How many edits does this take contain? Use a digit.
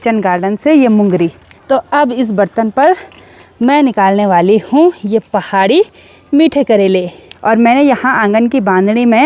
2